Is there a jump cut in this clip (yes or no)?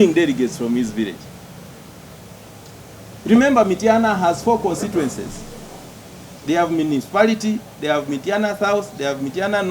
no